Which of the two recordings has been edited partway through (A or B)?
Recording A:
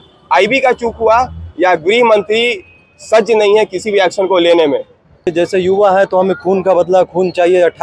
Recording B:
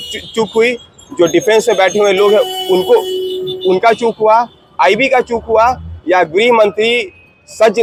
A